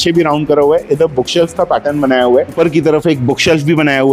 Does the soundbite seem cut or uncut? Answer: cut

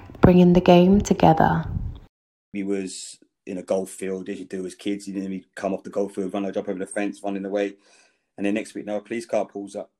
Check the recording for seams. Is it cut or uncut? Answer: cut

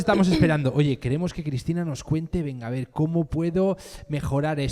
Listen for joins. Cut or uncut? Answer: uncut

